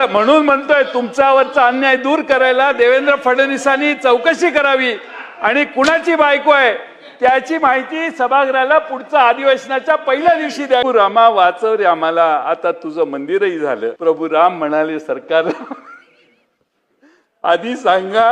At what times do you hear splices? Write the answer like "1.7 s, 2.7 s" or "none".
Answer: 10.8 s, 14.0 s